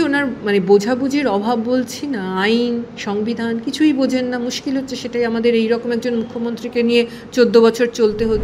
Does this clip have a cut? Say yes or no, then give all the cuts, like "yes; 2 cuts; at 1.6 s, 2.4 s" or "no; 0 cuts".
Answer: no; 0 cuts